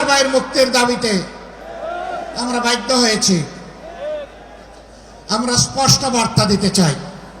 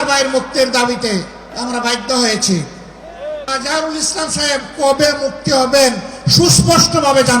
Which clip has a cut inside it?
second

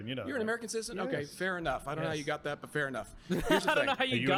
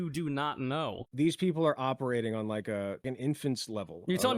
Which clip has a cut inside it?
second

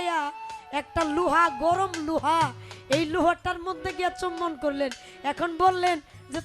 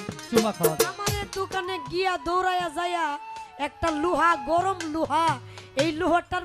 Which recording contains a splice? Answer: second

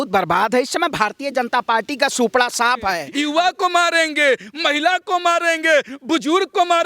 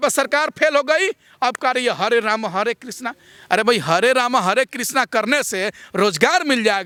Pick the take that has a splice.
first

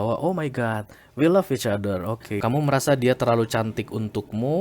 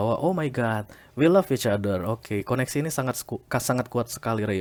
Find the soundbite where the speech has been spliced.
first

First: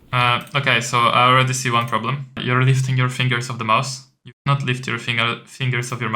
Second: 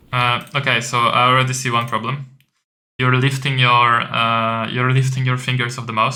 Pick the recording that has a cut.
first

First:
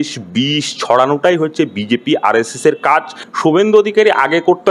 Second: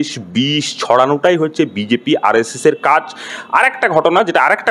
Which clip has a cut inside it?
first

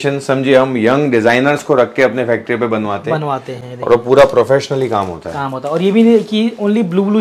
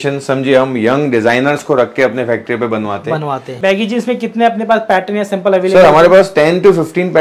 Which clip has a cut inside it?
second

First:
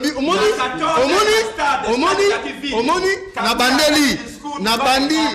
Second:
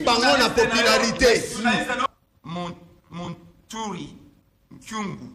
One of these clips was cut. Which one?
second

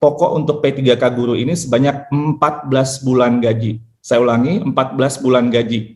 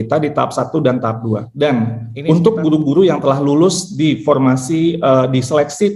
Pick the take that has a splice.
second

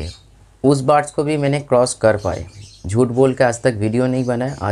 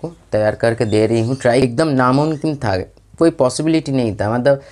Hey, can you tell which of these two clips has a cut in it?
second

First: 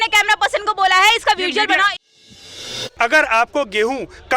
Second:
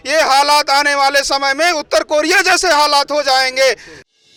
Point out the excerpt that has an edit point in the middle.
first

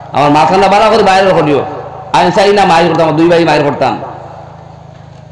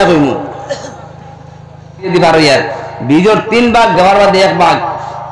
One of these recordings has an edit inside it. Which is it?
second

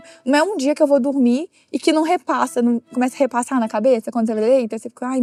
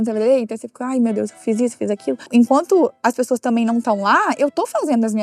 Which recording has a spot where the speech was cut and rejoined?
second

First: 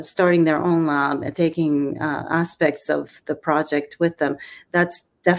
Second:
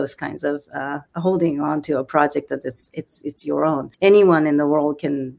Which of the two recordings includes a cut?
second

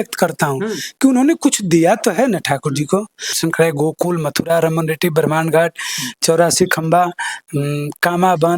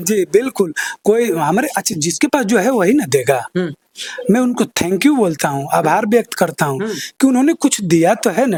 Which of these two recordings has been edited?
first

